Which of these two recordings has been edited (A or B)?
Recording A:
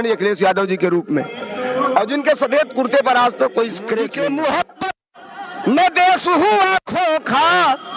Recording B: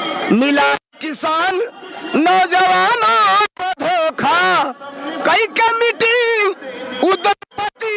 A